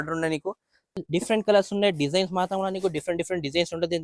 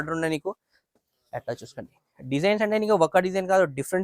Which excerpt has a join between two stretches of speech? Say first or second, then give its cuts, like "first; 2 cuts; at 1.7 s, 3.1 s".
first; 1 cut; at 1.0 s